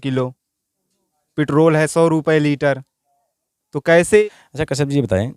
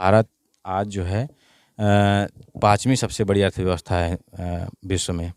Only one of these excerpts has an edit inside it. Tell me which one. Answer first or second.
first